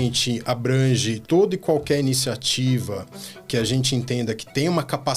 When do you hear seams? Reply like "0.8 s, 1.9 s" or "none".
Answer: 1.2 s